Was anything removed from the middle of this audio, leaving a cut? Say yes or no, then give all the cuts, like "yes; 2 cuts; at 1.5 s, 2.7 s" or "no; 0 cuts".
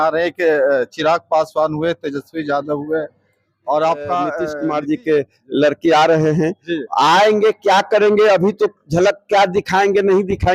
yes; 1 cut; at 4.5 s